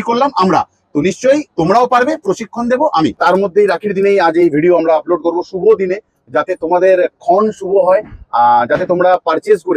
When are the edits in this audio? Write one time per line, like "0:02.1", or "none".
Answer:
0:03.2